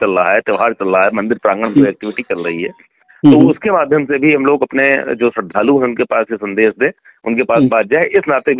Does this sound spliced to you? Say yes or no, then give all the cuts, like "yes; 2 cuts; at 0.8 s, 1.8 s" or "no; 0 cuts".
no; 0 cuts